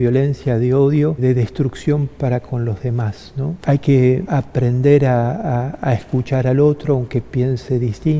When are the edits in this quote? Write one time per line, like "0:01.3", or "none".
0:01.2
0:03.6
0:04.3